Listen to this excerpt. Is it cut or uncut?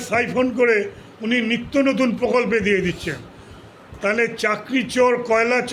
uncut